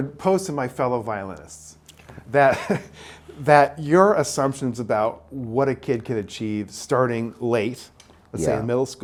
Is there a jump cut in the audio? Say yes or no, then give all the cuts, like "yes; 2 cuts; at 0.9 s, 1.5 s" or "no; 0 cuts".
no; 0 cuts